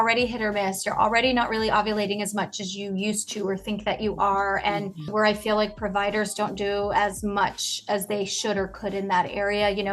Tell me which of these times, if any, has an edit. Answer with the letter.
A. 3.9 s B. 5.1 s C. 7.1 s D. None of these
B